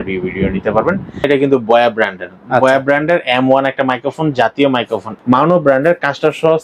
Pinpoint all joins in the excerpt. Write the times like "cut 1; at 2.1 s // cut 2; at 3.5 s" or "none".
cut 1; at 1.3 s // cut 2; at 5.1 s